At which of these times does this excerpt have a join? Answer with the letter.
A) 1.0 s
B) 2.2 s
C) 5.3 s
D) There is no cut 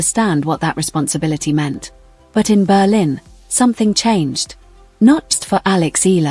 C